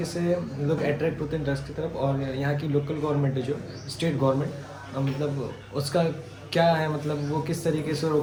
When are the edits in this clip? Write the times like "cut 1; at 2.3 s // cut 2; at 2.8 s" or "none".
none